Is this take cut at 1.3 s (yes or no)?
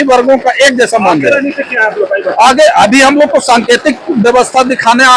no